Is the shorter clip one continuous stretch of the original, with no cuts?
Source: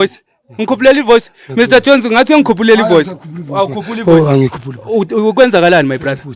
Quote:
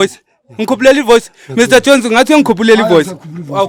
yes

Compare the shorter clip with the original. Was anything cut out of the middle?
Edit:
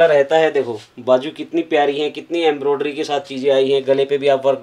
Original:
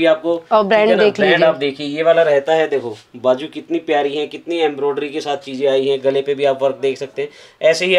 no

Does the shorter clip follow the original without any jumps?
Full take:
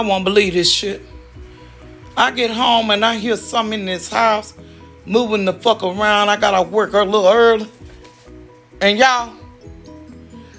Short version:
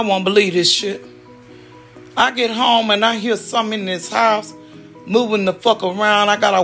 yes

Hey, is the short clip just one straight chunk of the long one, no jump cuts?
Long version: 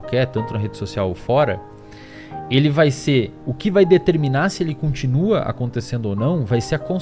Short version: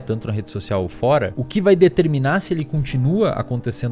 no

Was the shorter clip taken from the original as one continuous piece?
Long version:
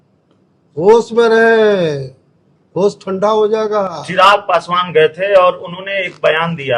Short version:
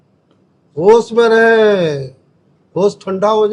yes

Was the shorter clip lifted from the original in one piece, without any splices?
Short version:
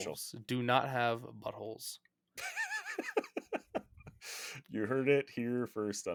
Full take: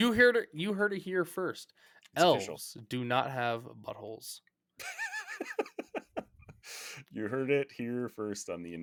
yes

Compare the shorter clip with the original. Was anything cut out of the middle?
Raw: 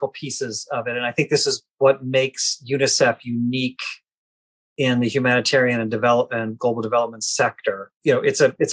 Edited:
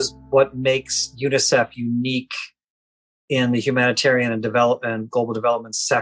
no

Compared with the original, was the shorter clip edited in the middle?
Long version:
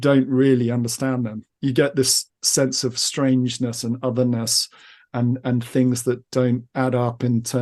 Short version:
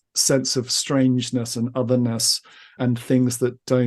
yes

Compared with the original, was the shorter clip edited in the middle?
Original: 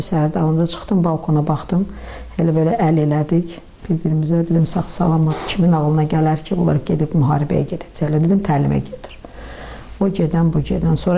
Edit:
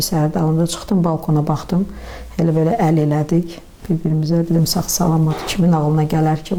no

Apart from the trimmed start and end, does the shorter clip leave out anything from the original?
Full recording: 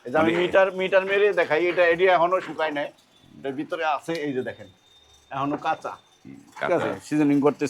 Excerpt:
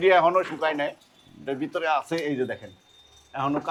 no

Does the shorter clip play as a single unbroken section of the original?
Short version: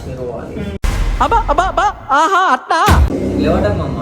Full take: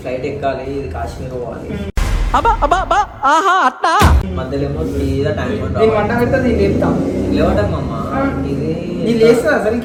no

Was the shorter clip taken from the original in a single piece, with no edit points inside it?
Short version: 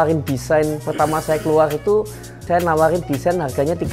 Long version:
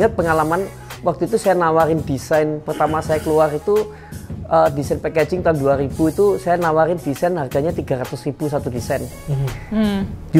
no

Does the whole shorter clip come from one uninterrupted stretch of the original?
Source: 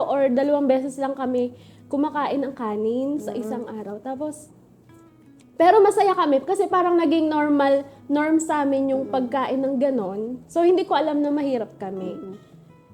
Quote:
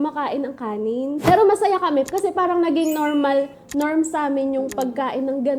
no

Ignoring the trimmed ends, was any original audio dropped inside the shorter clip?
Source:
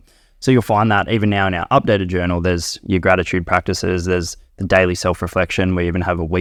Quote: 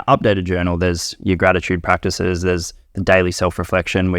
no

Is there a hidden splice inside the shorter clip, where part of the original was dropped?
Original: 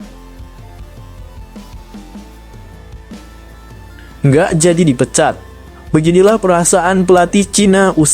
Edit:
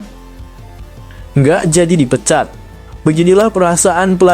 yes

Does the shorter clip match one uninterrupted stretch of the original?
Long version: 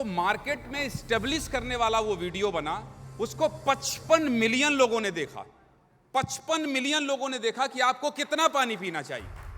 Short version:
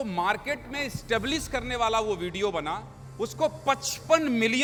yes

